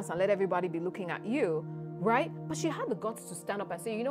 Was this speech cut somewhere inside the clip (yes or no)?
no